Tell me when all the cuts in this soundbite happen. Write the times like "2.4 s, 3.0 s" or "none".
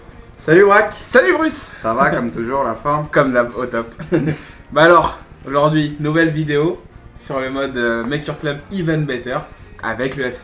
6.3 s